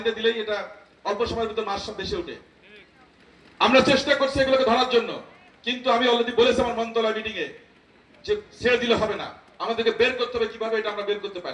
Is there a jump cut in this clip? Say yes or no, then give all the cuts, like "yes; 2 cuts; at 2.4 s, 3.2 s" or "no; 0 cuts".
no; 0 cuts